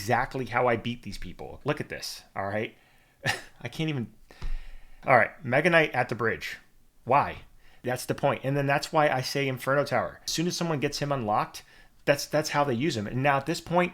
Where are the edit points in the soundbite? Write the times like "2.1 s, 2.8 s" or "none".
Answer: 1.6 s, 4.9 s, 7.8 s, 10.3 s